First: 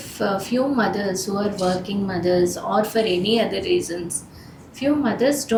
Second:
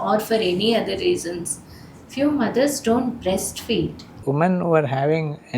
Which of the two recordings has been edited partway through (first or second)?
second